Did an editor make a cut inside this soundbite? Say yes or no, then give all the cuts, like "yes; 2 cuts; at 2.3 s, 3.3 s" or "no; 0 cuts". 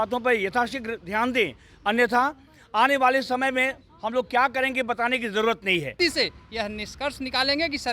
yes; 1 cut; at 5.9 s